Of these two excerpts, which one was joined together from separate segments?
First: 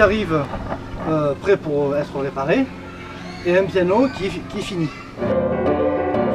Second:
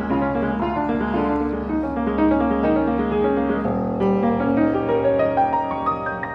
second; 1 cut; at 4.0 s

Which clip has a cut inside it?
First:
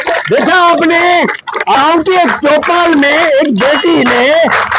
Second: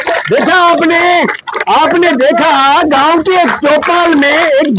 first; 1 cut; at 1.8 s

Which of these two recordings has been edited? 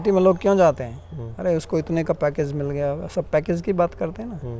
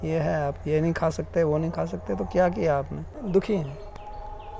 second; 1 cut; at 3.2 s

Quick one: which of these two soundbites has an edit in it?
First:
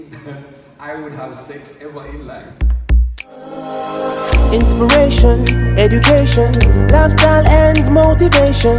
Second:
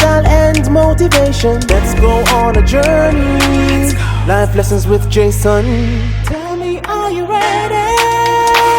first; 1 cut; at 2.5 s

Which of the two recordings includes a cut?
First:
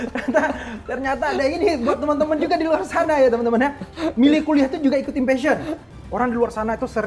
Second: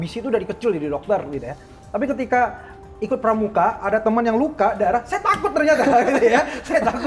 first; 1 cut; at 5.8 s

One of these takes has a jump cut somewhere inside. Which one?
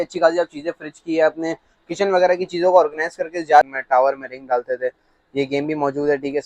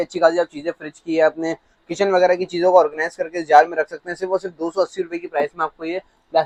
first; 1 cut; at 3.7 s

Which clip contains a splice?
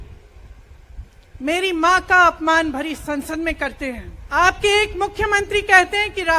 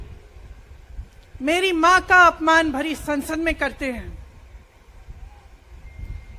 first; 1 cut; at 4.1 s

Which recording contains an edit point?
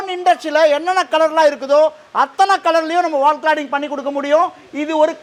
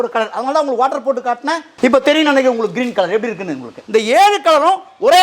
second; 2 cuts; at 1.7 s, 3.8 s

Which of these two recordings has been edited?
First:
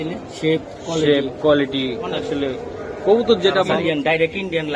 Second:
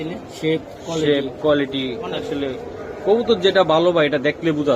first; 1 cut; at 3.7 s

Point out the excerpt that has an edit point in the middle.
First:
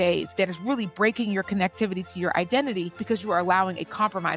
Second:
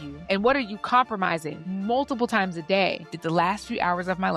second; 2 cuts; at 1.6 s, 3.0 s

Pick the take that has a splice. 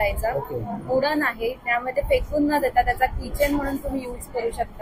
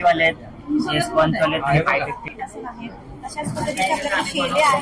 second; 1 cut; at 2.2 s

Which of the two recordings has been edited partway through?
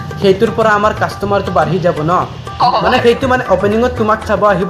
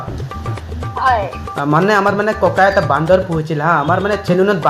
first; 1 cut; at 2.6 s

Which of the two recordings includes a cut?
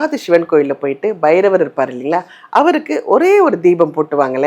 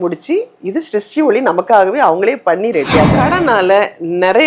second; 1 cut; at 3.1 s

